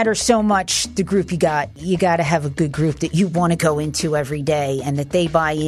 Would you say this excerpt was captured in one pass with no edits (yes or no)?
no